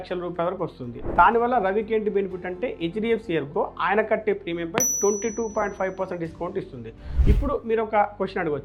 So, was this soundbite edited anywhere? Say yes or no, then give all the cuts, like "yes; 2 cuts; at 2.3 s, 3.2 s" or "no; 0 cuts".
yes; 2 cuts; at 1.1 s, 7.1 s